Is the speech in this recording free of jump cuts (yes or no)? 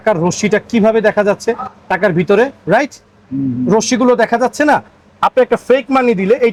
yes